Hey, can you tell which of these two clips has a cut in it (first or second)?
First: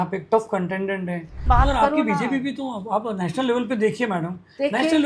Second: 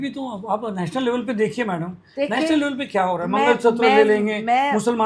first